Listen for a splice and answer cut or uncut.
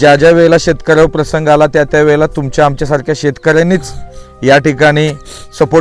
uncut